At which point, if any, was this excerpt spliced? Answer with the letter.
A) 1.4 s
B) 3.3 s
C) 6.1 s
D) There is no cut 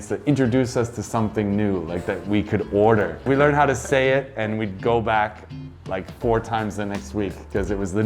B